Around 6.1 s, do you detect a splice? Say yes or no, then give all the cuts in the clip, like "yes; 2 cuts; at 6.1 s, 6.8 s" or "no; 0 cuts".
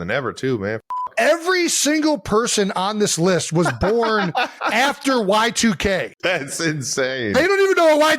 yes; 1 cut; at 6.1 s